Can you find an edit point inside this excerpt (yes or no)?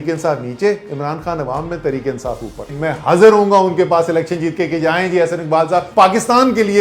yes